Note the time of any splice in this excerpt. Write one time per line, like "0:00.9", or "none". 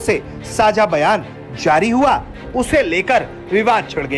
none